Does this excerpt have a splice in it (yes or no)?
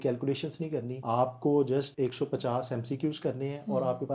yes